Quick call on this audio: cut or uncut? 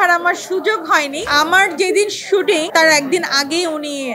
cut